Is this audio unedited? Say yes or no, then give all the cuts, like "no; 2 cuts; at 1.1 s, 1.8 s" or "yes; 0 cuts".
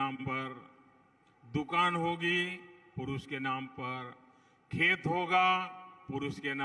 yes; 0 cuts